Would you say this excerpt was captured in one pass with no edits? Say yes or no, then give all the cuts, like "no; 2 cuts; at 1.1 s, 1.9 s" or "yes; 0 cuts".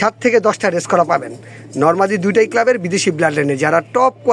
yes; 0 cuts